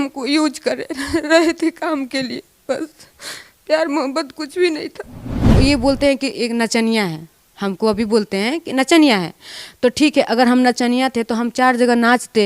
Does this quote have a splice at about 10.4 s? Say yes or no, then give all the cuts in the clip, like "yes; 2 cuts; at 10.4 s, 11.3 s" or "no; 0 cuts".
no; 1 cut; at 5.5 s